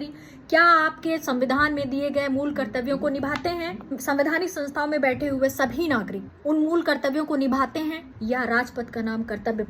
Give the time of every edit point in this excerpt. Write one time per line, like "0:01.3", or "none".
0:04.0
0:06.2
0:08.1